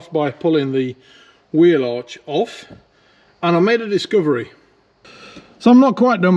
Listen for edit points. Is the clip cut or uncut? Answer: cut